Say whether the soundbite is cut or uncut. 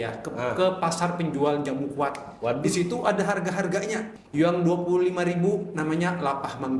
cut